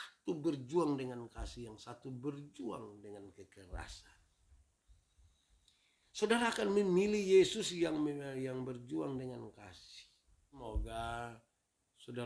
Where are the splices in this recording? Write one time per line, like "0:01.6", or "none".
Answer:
0:10.6